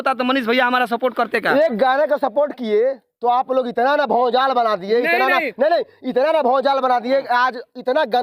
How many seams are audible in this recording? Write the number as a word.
zero